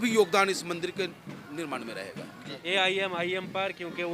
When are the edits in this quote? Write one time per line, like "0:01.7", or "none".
0:02.6